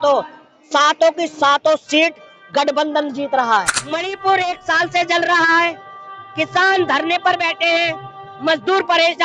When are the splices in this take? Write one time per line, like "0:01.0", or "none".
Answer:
0:03.8